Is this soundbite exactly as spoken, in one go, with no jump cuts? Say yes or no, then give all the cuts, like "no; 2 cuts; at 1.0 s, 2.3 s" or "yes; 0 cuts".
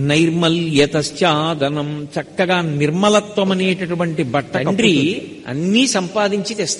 no; 1 cut; at 4.6 s